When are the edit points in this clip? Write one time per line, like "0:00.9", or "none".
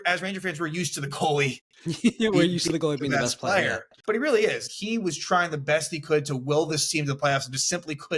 0:03.9
0:04.7

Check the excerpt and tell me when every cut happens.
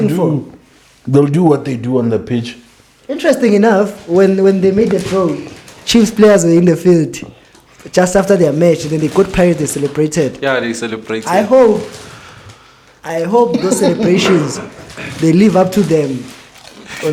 none

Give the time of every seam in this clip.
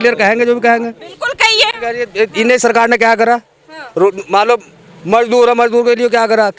none

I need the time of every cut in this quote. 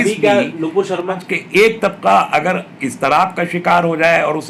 0:01.2

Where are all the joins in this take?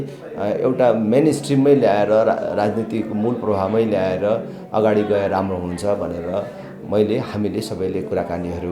none

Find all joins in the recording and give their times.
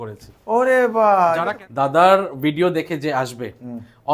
0:01.4

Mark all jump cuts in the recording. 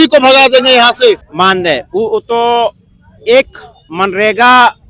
0:01.3

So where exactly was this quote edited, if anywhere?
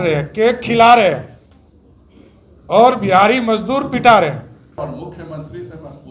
0:04.8

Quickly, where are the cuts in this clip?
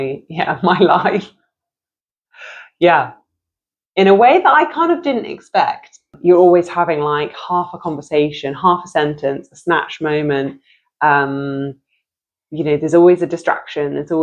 0:06.1

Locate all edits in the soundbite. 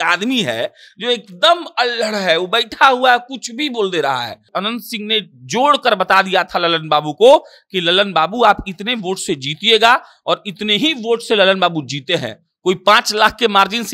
0:04.5

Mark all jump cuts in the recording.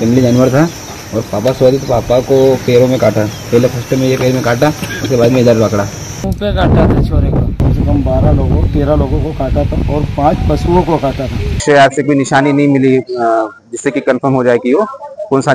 0:06.3
0:07.6
0:11.6

